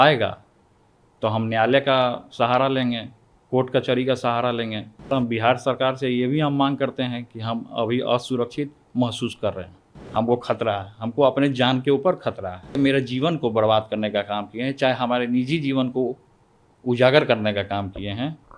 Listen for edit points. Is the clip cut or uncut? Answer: cut